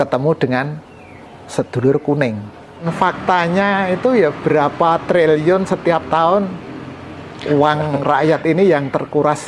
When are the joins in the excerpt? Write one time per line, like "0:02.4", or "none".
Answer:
0:02.9